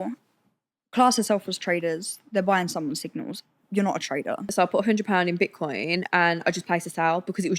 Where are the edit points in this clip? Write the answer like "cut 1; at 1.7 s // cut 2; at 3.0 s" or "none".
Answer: cut 1; at 4.4 s